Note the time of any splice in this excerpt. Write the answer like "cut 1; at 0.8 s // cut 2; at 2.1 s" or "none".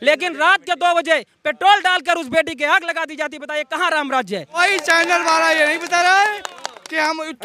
cut 1; at 4.6 s